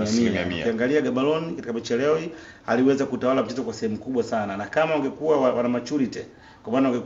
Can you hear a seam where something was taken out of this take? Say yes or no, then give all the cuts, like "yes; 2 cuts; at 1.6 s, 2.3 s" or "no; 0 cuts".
no; 0 cuts